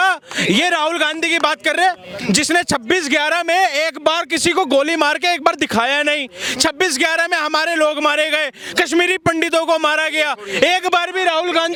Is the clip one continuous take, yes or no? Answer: yes